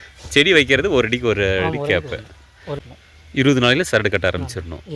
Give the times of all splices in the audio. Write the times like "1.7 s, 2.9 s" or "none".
2.8 s